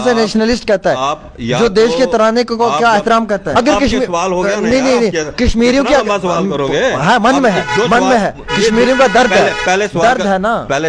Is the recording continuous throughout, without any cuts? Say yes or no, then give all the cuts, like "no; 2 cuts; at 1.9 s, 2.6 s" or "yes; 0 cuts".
no; 1 cut; at 3.5 s